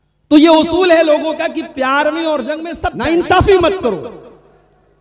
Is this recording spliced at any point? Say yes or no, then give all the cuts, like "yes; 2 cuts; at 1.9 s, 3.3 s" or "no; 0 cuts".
yes; 1 cut; at 2.8 s